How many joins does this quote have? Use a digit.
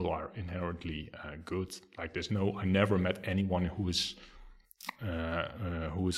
0